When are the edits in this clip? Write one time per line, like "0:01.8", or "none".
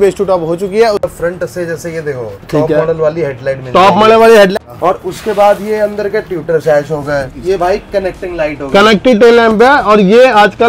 0:01.1
0:04.5
0:07.3